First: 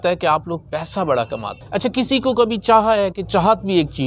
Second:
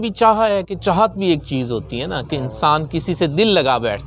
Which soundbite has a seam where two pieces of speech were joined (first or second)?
first